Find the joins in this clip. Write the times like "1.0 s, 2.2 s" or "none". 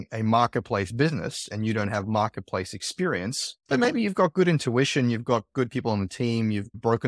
none